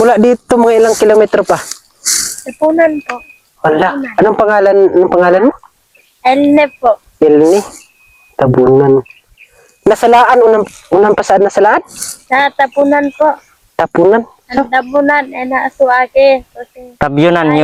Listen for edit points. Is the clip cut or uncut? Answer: uncut